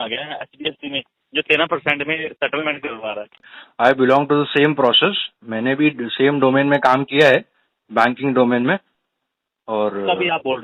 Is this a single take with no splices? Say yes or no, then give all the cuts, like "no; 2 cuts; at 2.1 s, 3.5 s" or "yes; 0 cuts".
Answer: no; 1 cut; at 3.5 s